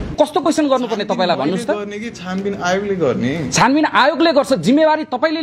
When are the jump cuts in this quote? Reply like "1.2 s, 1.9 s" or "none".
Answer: none